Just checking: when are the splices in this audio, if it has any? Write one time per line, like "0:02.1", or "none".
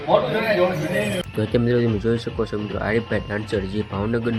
none

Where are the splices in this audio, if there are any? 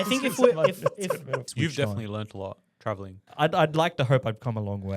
0:01.4
0:03.2

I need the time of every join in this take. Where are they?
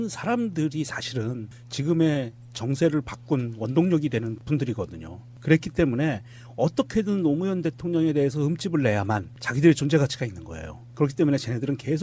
0:10.0

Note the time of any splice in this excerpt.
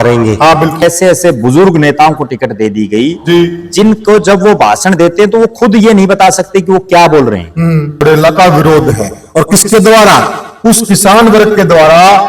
0:00.8
0:08.0

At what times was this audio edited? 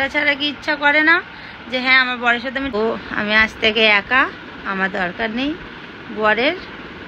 0:02.7

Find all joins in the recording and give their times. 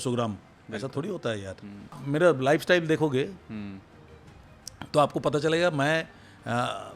0:02.0

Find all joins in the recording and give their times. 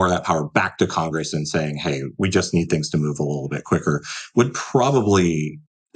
none

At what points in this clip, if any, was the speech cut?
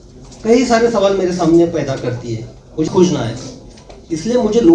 0:02.9

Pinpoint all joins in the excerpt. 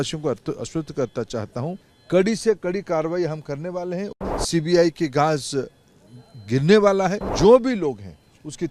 0:01.9
0:04.1
0:07.2

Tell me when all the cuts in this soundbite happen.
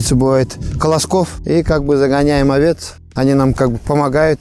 none

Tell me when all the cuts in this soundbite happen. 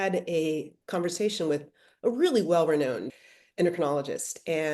0:03.2

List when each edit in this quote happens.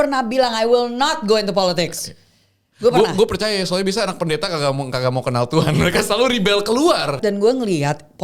0:07.2

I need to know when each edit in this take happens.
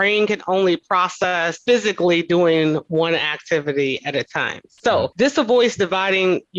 none

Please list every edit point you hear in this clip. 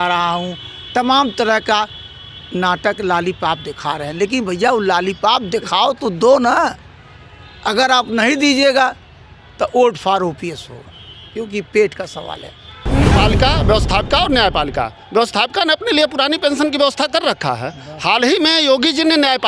0:13.1

